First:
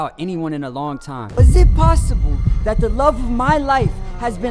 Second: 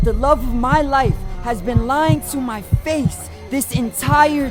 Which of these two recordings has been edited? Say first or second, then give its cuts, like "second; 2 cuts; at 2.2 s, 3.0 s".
first; 1 cut; at 1.4 s